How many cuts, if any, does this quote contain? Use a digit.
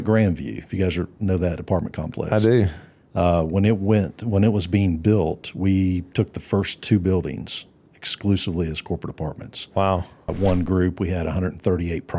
1